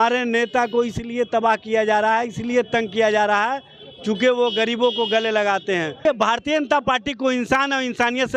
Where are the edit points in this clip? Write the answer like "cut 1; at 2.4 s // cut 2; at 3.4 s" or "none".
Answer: cut 1; at 6.0 s

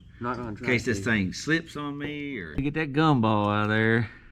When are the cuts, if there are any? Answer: cut 1; at 2.6 s

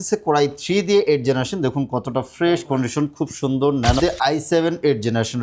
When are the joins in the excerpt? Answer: cut 1; at 4.0 s

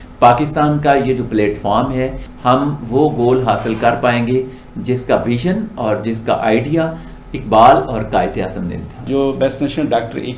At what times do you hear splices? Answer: cut 1; at 2.2 s // cut 2; at 9.1 s

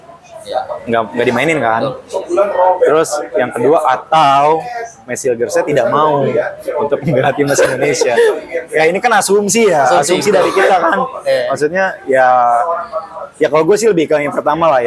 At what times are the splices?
none

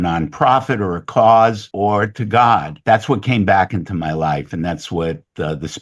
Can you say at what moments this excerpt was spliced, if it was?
cut 1; at 1.7 s // cut 2; at 2.7 s

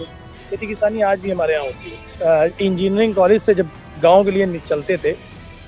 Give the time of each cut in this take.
cut 1; at 2.0 s

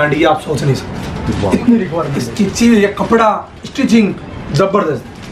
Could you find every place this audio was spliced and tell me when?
cut 1; at 2.2 s

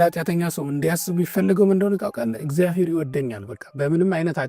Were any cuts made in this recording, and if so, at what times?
none

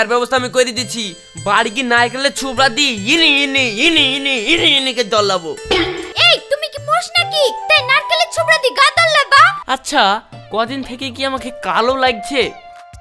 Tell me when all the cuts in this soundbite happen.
cut 1; at 9.6 s

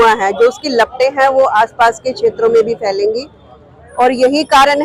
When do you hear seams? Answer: none

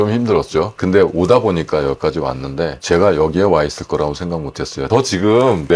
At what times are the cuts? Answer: cut 1; at 0.8 s // cut 2; at 2.8 s // cut 3; at 4.9 s

